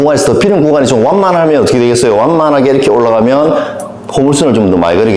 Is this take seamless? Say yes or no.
yes